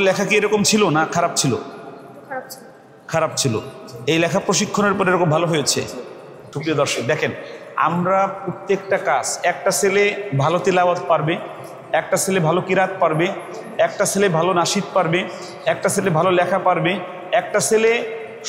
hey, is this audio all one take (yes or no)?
no